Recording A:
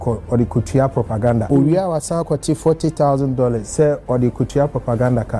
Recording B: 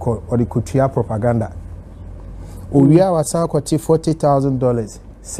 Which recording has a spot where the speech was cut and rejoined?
A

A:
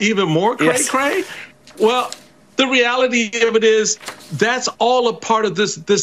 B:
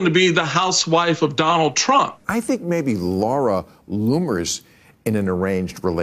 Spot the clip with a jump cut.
B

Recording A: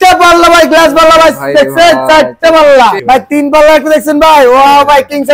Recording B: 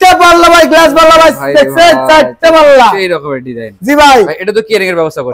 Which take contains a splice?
A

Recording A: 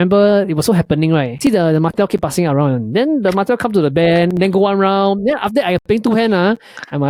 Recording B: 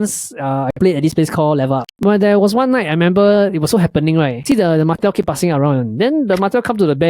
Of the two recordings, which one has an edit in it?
B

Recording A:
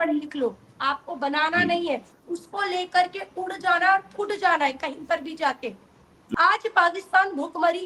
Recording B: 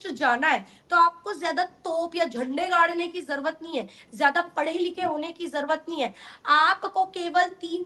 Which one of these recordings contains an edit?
A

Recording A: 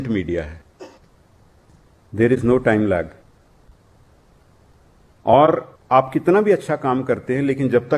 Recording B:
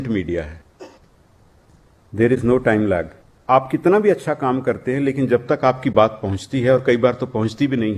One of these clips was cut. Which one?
B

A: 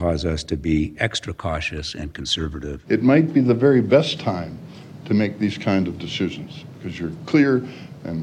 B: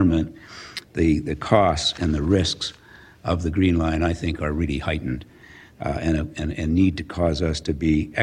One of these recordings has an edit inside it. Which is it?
A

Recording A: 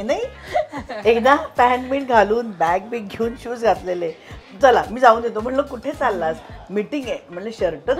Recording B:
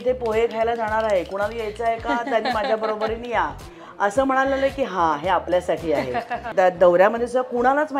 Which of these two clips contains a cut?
B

